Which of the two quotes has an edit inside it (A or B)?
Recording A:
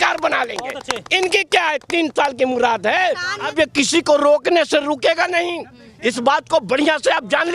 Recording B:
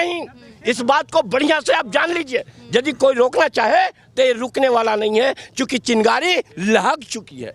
A